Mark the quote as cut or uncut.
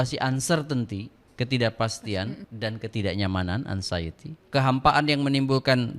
cut